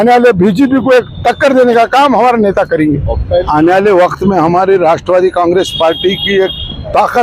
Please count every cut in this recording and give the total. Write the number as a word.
one